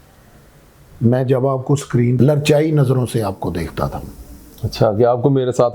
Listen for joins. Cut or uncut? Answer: cut